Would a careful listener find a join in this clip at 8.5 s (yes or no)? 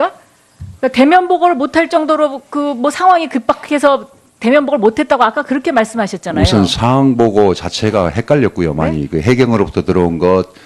no